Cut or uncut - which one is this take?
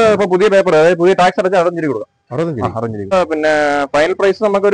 cut